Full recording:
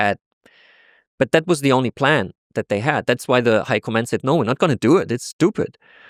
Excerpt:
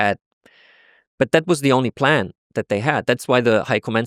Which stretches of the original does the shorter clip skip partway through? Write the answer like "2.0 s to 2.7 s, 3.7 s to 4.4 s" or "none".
none